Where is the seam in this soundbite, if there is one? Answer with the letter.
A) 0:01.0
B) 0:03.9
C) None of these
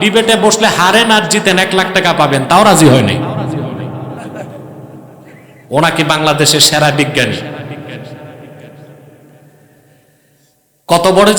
C